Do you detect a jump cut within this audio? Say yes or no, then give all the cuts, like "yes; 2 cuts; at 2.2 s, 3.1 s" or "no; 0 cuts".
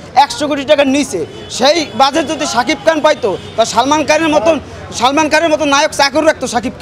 no; 0 cuts